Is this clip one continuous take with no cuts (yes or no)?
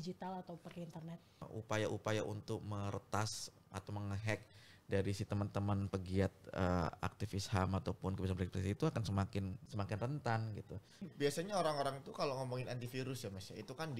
no